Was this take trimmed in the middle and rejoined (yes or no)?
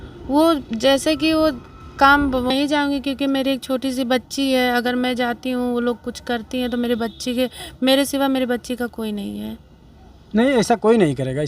yes